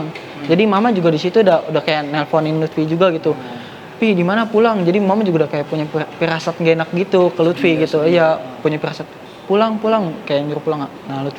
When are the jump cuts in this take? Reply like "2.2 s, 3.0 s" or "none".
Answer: none